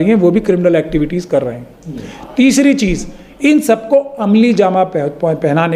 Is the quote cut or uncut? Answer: uncut